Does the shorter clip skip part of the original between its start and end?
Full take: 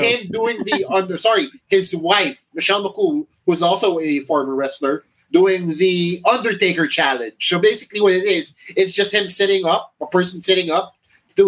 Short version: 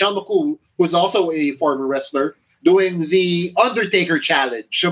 no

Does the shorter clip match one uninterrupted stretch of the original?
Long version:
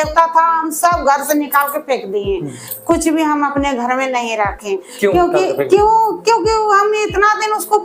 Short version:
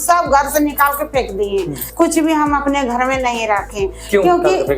no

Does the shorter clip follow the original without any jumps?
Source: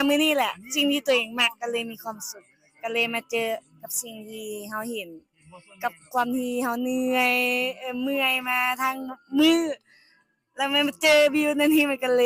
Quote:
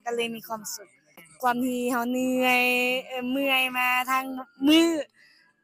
no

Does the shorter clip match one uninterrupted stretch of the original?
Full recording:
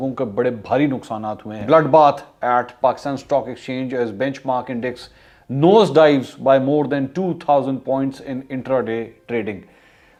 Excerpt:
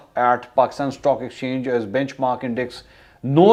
yes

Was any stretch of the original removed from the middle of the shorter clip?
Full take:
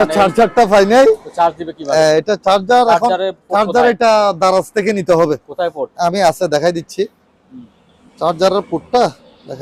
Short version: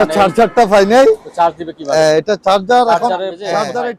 no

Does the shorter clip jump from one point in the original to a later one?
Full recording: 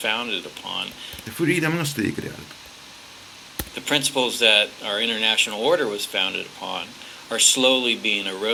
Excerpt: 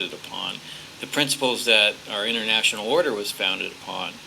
yes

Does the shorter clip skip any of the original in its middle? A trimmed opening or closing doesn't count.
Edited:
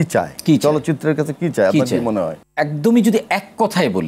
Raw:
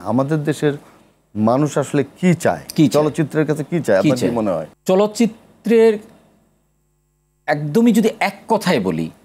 yes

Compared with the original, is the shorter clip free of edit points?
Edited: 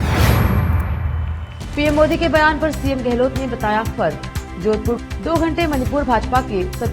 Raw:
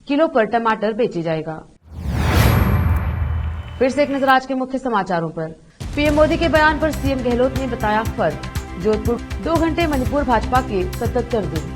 no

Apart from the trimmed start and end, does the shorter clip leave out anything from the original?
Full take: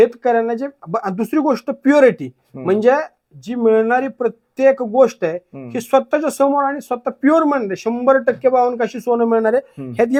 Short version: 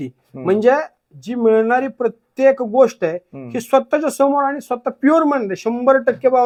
no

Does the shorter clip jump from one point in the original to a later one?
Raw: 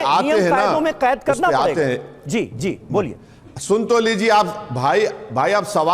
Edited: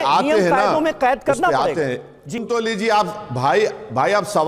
yes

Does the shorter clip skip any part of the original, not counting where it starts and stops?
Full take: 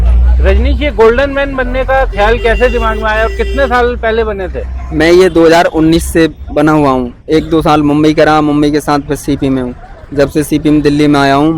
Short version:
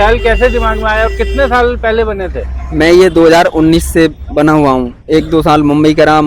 no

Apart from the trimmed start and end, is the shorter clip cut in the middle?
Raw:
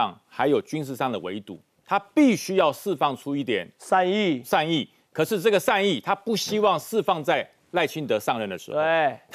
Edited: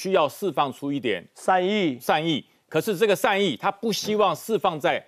no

